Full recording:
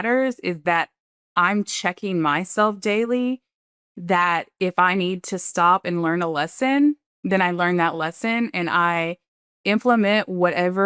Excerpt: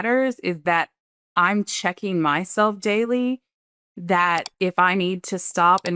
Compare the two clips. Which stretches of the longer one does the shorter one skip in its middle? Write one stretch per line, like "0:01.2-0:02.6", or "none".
none